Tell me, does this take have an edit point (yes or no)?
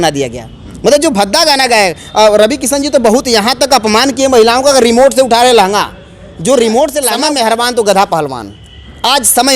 yes